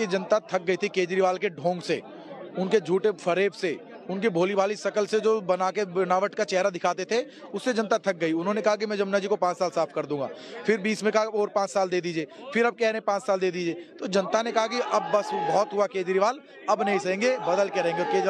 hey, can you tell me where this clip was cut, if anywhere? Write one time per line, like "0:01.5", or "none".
none